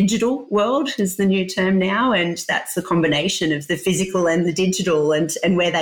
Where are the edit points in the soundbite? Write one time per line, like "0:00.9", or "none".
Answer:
none